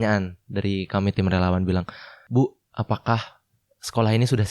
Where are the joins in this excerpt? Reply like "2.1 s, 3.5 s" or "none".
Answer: 2.2 s

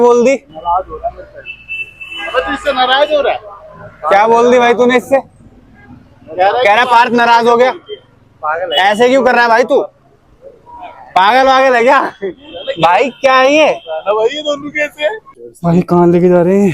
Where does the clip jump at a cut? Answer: 15.4 s

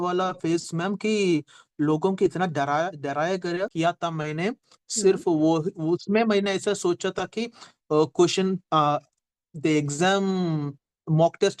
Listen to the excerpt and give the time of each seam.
3.7 s

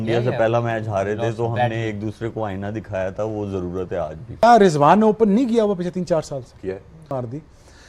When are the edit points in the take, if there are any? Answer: 4.4 s, 7.1 s

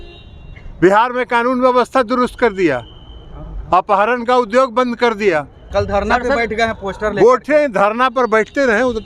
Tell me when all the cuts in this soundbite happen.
5.6 s

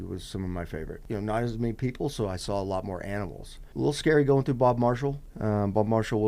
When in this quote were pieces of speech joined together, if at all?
1.0 s, 3.6 s, 5.3 s

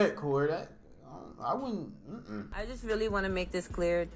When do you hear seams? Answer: 2.5 s

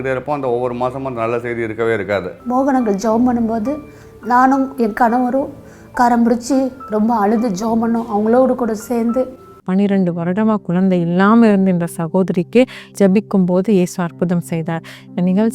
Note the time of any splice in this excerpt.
2.3 s, 9.5 s

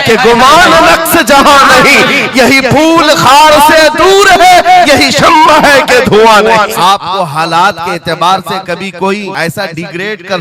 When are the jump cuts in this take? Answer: 6.7 s, 9.3 s

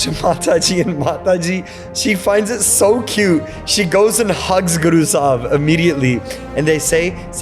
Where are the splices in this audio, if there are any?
1.8 s, 6.4 s

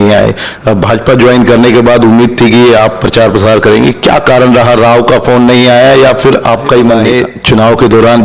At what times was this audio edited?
7.1 s

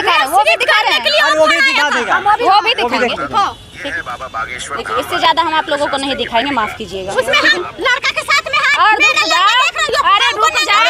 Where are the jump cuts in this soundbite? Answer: none

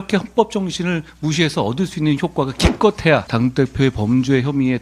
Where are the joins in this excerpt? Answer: 3.3 s

